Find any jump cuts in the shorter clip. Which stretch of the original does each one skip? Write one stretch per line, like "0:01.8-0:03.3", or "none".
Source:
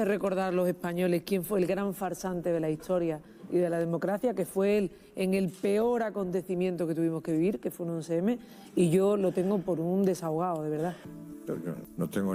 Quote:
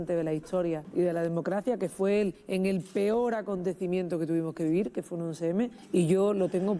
0:03.2-0:03.4
0:05.0-0:05.1
0:08.5-0:08.6